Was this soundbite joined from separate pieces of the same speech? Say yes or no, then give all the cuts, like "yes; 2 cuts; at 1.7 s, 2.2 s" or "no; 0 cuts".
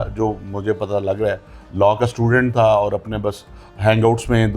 no; 0 cuts